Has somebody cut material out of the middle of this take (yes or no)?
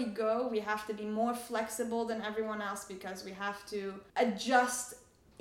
yes